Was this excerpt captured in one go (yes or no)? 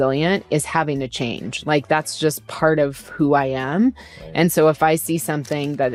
yes